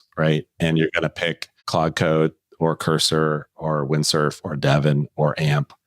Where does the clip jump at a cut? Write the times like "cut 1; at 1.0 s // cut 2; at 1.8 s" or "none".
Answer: cut 1; at 1.6 s